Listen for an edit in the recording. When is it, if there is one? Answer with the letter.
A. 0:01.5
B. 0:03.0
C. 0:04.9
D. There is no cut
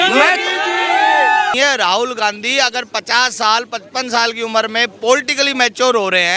A